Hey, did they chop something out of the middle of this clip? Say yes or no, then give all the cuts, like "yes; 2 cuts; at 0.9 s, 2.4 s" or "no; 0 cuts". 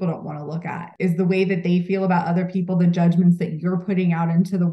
yes; 1 cut; at 0.9 s